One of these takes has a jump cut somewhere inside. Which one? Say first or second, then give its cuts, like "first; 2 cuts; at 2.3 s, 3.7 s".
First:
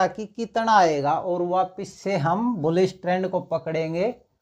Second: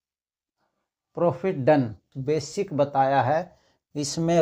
second; 1 cut; at 2.1 s